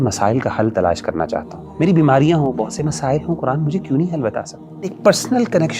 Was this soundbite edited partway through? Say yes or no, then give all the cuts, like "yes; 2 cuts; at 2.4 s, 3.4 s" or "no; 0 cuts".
yes; 2 cuts; at 1.6 s, 4.9 s